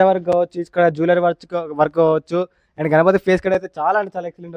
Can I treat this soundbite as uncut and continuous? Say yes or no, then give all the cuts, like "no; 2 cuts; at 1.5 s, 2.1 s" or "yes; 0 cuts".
yes; 0 cuts